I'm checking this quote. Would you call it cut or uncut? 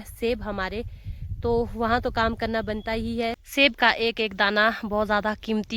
cut